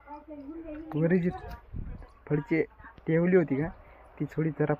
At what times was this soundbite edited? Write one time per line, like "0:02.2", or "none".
none